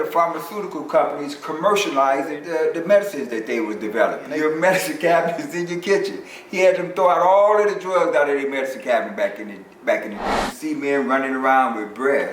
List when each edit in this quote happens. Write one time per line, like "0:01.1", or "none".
0:02.4
0:04.3
0:10.5